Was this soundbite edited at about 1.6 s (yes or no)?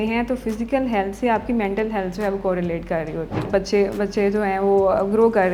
no